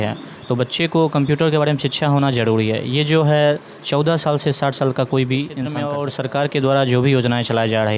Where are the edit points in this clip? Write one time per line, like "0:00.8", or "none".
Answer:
0:05.8